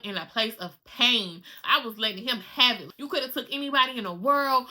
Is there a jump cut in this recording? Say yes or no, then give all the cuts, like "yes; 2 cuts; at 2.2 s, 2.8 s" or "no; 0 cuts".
yes; 2 cuts; at 1.6 s, 2.9 s